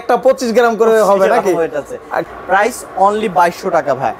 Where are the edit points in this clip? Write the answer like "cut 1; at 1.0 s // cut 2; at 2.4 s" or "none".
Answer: cut 1; at 2.2 s